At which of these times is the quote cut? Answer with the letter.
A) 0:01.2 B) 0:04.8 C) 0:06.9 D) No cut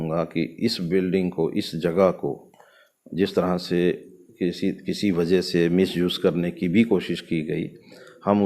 D